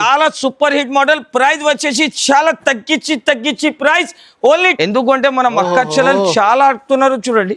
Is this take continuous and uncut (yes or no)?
no